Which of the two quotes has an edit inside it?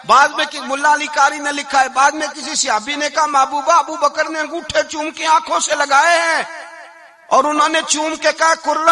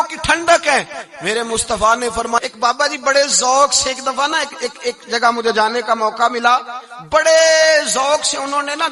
second; 1 cut; at 2.4 s

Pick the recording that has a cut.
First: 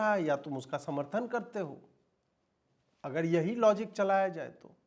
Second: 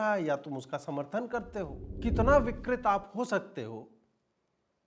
second; 1 cut; at 1.8 s

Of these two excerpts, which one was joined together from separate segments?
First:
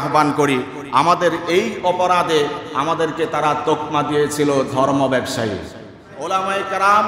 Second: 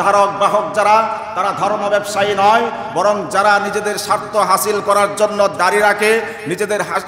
first; 1 cut; at 6.1 s

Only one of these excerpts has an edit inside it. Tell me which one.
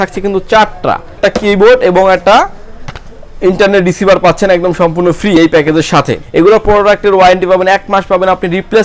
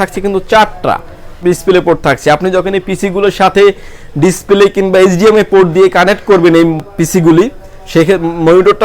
first; 2 cuts; at 1.2 s, 6.2 s

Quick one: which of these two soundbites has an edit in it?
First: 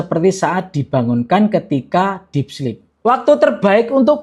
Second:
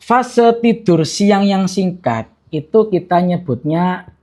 first; 1 cut; at 2.9 s

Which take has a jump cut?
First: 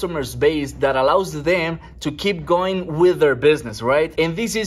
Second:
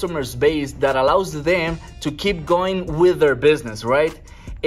first; 1 cut; at 3.8 s

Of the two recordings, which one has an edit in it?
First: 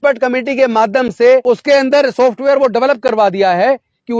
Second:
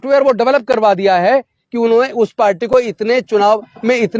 first; 1 cut; at 1.4 s

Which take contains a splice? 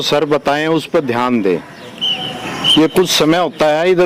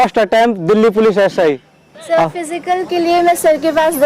second; 1 cut; at 1.9 s

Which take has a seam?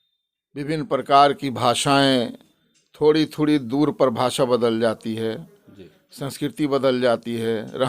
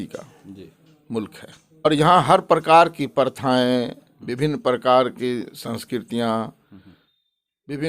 second; 1 cut; at 1.9 s

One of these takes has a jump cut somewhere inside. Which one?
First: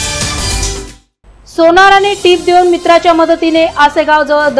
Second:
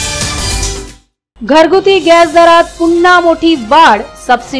second; 1 cut; at 1.0 s

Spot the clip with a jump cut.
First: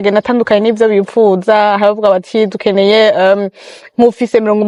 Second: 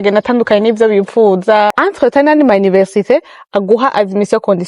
second; 1 cut; at 1.7 s

